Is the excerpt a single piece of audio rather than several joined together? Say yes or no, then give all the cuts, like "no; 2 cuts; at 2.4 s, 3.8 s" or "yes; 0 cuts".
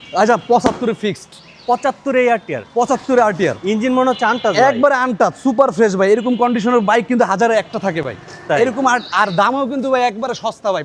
yes; 0 cuts